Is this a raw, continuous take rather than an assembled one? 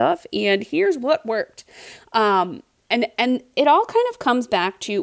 yes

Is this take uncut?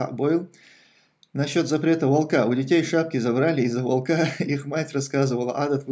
yes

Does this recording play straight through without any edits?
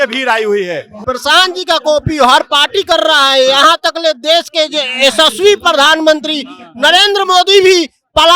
no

